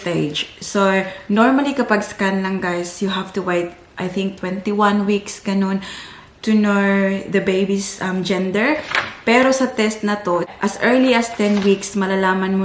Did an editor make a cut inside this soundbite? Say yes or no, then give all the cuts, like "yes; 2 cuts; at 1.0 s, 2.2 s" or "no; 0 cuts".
yes; 1 cut; at 10.5 s